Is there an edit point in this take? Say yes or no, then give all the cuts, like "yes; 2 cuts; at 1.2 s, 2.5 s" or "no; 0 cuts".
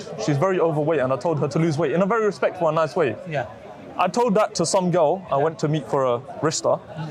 no; 0 cuts